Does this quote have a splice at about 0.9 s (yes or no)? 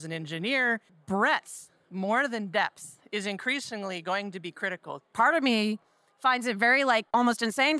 yes